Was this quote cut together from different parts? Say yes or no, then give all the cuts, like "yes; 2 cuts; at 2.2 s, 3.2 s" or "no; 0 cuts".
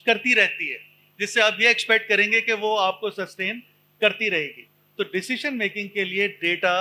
no; 0 cuts